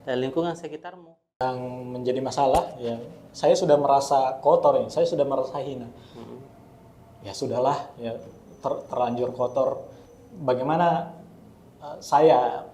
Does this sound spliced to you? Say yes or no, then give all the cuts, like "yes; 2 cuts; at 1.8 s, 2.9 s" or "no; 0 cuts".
yes; 1 cut; at 1.4 s